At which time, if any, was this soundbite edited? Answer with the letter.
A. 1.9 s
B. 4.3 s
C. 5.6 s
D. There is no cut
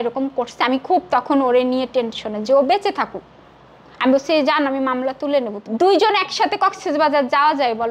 C